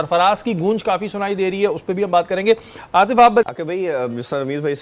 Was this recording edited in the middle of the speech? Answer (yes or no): yes